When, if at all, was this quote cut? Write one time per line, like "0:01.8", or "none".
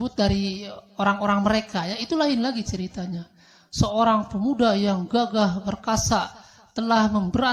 none